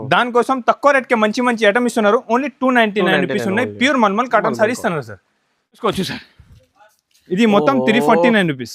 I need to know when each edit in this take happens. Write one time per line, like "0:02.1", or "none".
0:05.8